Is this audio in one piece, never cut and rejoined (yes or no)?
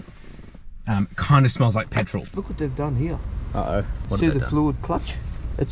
no